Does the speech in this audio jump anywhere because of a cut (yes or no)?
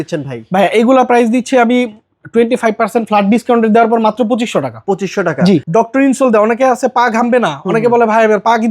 yes